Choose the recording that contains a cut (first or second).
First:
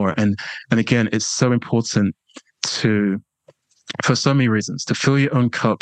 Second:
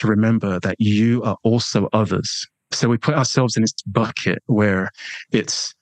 second